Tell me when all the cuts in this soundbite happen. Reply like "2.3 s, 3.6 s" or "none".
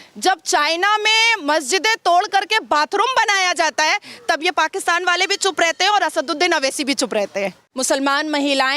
7.7 s